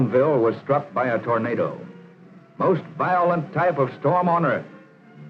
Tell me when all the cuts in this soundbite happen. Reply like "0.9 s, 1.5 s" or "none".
none